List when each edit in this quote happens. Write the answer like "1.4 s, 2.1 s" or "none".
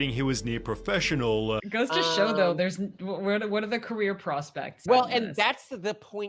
1.6 s, 4.8 s